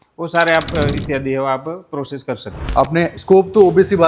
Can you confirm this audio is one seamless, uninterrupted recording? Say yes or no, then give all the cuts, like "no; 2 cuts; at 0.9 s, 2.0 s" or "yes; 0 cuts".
no; 1 cut; at 2.6 s